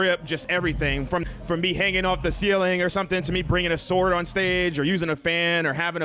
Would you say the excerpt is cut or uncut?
cut